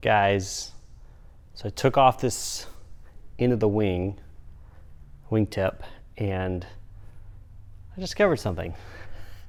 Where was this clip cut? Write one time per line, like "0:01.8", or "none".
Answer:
none